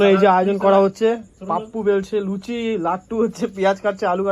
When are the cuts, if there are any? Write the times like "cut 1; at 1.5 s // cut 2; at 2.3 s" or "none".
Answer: none

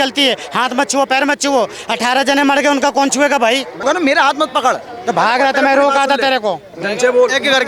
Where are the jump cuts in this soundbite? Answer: cut 1; at 3.8 s

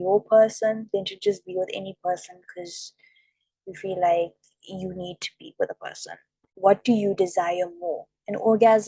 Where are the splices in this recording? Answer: cut 1; at 6.5 s

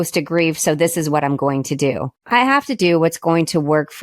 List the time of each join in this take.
cut 1; at 2.1 s

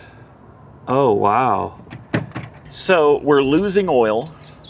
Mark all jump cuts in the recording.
cut 1; at 2.7 s

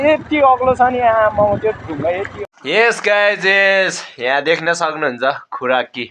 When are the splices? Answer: cut 1; at 2.3 s

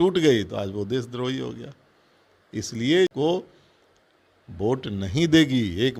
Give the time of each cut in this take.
cut 1; at 3.1 s

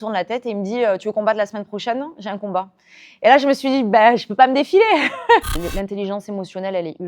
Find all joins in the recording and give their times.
cut 1; at 5.6 s

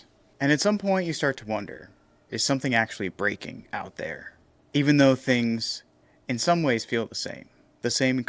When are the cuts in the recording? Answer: cut 1; at 2.3 s

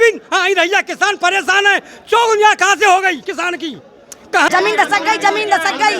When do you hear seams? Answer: cut 1; at 4.5 s

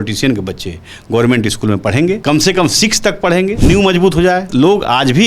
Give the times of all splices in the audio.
cut 1; at 2.2 s // cut 2; at 3.6 s // cut 3; at 4.5 s

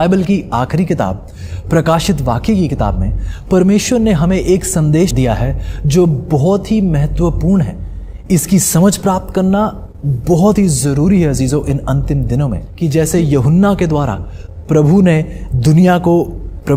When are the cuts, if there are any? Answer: cut 1; at 5.1 s // cut 2; at 12.7 s

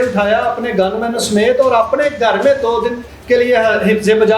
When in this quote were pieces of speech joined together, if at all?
cut 1; at 3.1 s

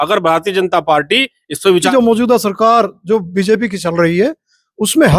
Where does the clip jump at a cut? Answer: cut 1; at 1.9 s

